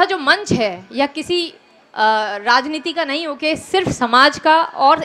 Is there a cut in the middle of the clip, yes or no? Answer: no